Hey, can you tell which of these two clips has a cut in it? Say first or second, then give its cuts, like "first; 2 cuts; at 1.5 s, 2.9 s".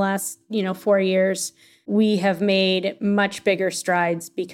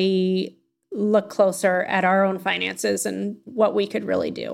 first; 1 cut; at 1.8 s